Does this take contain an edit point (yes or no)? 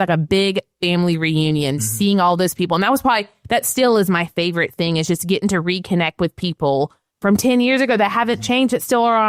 no